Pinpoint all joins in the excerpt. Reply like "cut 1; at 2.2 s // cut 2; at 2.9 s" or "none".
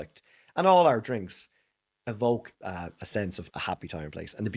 cut 1; at 2.5 s // cut 2; at 3.4 s